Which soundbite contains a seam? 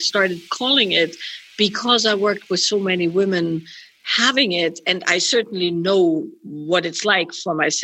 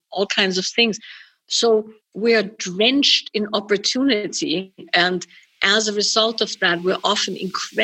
second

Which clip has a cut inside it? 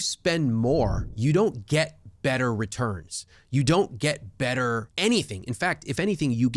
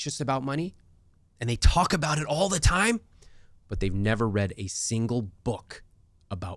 first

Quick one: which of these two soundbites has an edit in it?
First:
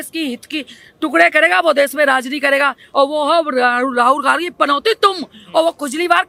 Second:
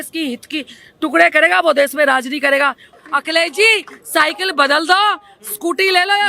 second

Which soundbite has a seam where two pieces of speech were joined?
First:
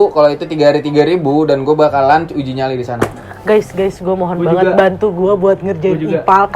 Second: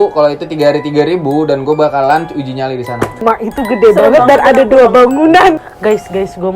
second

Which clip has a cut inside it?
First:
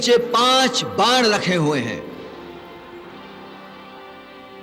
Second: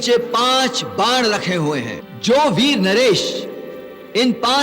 second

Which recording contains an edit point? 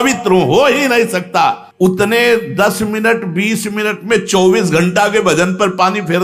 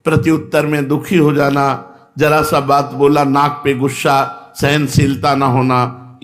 first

